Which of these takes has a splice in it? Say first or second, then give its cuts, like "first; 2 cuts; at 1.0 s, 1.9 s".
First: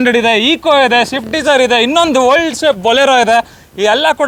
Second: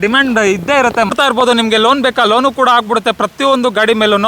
second; 1 cut; at 1.1 s